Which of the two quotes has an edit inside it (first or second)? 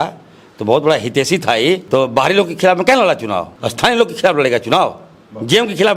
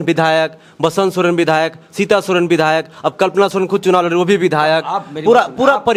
first